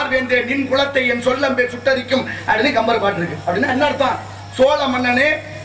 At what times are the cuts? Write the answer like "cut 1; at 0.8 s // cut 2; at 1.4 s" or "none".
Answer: none